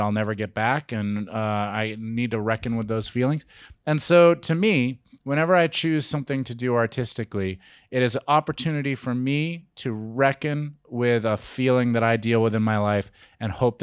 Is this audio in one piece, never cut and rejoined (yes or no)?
yes